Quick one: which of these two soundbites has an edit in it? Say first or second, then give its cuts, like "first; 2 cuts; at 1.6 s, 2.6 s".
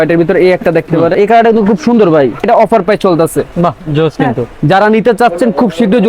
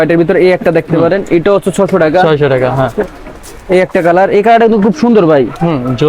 first; 2 cuts; at 1.1 s, 2.4 s